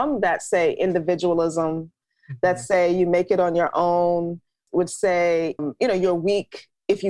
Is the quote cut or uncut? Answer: cut